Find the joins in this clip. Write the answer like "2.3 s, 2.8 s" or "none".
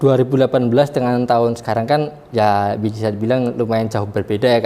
none